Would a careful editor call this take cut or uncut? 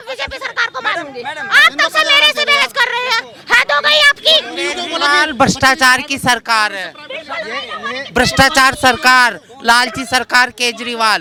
uncut